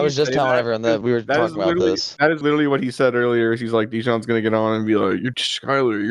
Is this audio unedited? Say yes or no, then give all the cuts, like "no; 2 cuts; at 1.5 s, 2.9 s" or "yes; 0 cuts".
yes; 0 cuts